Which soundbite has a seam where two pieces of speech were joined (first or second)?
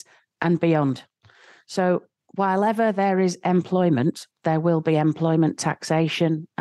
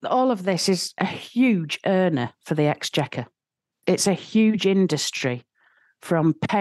second